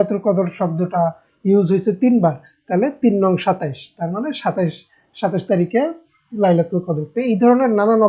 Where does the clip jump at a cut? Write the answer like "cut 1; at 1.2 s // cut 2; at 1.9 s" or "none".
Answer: none